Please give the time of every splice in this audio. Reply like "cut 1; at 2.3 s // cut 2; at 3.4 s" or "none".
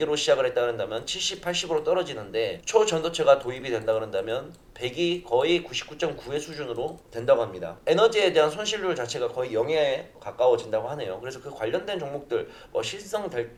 none